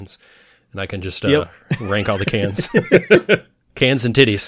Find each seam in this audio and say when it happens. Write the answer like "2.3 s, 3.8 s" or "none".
3.6 s